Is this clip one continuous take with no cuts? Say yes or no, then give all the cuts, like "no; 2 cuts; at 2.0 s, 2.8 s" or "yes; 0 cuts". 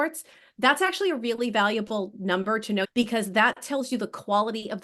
no; 1 cut; at 2.8 s